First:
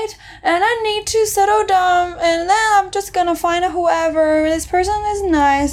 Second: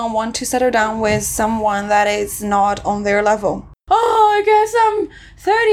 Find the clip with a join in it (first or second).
second